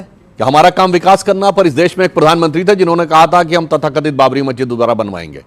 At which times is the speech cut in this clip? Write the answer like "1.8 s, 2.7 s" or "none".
none